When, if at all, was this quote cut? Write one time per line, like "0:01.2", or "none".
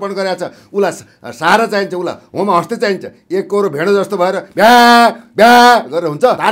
none

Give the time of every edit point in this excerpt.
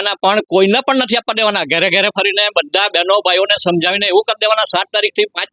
none

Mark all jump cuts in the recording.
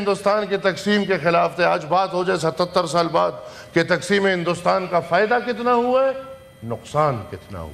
none

